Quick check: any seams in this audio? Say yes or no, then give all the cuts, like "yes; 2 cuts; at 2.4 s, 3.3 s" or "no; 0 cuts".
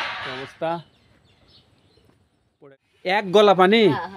yes; 1 cut; at 2.5 s